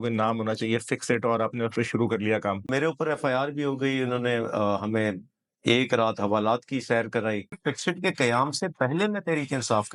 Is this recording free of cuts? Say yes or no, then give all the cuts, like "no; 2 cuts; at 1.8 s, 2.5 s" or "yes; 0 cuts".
no; 2 cuts; at 2.7 s, 7.5 s